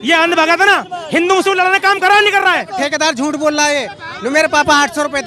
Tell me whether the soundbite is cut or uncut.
cut